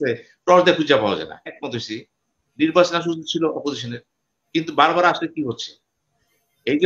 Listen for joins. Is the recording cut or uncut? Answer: cut